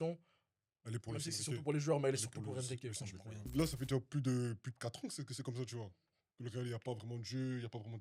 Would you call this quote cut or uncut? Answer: cut